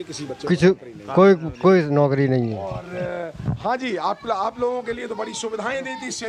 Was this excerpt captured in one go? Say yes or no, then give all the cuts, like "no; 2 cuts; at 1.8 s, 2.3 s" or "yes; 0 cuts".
yes; 0 cuts